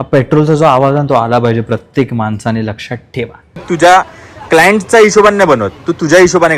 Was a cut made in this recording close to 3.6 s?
yes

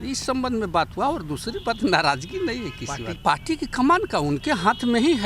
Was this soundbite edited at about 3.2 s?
yes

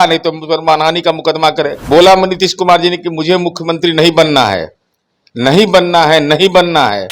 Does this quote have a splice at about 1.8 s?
yes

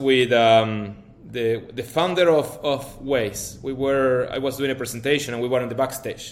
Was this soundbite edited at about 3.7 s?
no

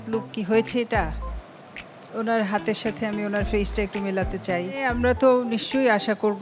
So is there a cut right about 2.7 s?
no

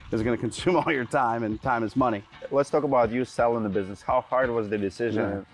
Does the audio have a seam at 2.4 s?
yes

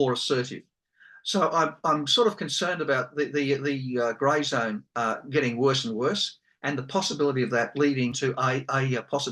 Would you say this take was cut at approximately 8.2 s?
yes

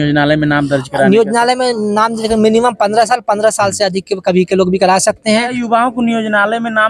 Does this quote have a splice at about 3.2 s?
no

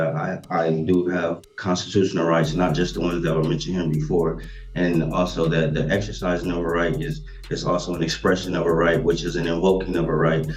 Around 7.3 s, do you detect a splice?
no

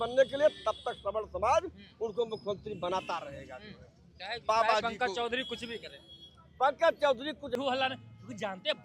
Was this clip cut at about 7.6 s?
yes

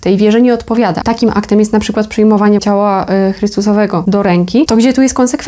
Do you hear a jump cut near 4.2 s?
yes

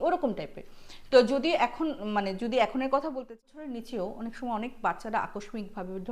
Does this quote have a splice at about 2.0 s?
no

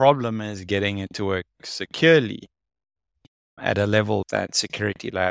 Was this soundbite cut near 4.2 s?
yes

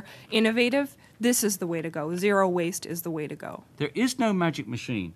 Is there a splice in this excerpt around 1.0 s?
no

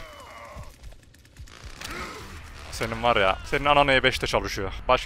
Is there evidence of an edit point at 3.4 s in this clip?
yes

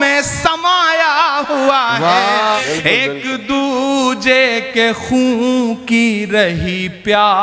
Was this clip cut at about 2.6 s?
yes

